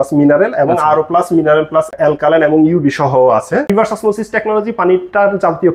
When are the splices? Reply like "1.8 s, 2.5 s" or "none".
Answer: 3.7 s